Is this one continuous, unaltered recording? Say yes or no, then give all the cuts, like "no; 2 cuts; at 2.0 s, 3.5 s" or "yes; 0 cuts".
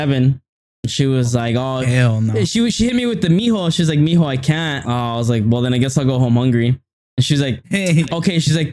no; 1 cut; at 4.8 s